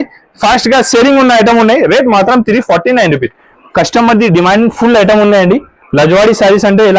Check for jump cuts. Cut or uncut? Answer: cut